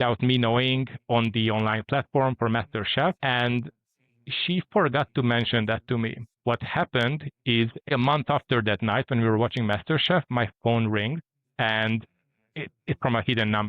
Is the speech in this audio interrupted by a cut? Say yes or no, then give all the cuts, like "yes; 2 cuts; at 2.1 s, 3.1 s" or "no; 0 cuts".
yes; 3 cuts; at 3.2 s, 6.4 s, 7.9 s